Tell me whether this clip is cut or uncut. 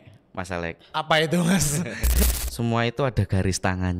cut